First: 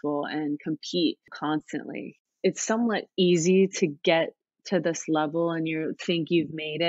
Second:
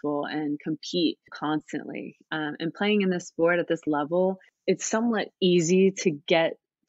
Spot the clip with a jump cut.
first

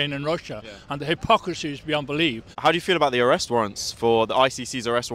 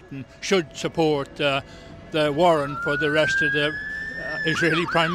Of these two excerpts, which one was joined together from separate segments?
first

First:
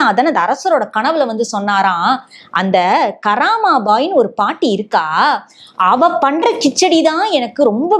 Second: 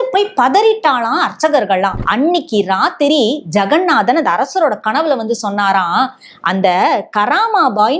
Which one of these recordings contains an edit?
second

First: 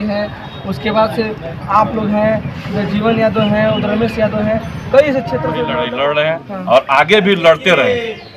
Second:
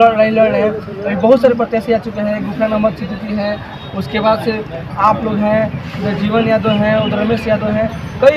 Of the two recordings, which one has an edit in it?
first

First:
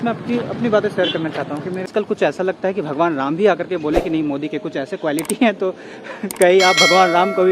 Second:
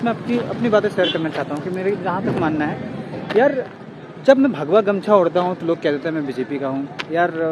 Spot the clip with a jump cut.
first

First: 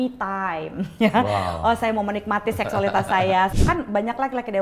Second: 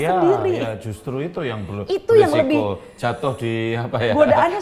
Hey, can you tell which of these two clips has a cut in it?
first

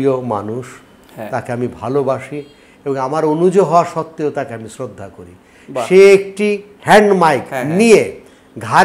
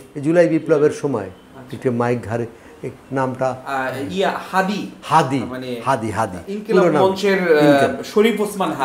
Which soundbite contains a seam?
first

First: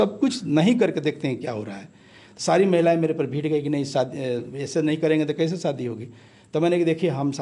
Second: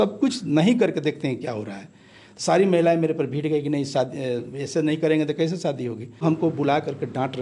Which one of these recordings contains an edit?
second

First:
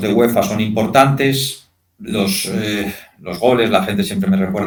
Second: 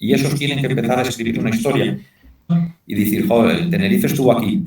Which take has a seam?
second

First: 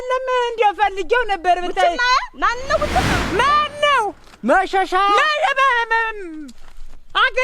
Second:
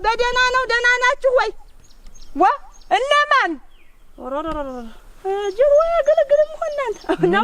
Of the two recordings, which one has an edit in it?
first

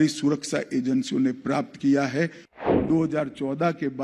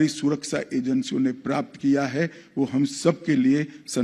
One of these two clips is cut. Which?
first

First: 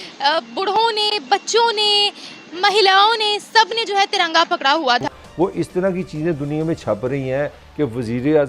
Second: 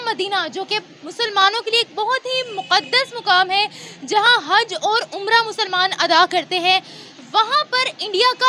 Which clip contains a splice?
first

